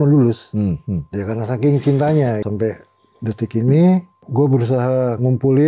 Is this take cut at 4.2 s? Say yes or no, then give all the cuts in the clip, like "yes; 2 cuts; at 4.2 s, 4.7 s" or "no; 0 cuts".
yes; 2 cuts; at 2.4 s, 4.2 s